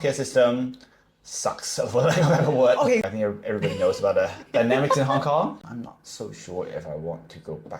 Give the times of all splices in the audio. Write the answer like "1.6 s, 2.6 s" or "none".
3.1 s, 5.5 s